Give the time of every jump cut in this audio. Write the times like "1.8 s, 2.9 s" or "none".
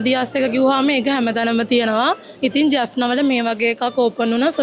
none

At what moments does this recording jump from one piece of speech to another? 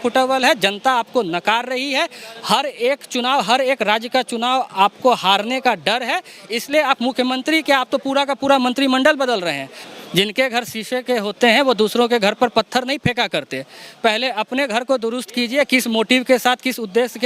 9.7 s

